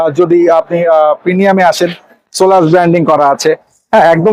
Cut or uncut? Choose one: uncut